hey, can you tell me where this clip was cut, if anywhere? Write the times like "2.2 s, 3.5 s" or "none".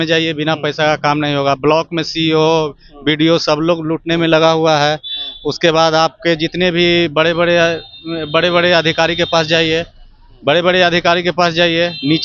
none

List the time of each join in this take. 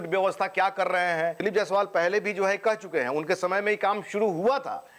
1.4 s

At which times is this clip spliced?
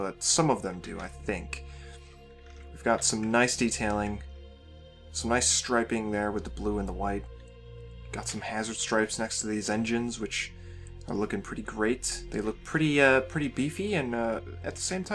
9.6 s

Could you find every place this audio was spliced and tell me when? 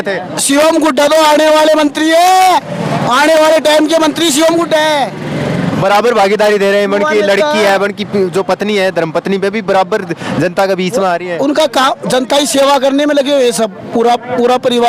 none

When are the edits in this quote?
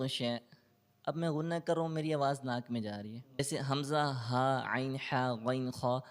3.4 s

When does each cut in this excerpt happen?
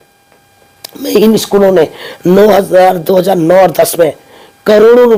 none

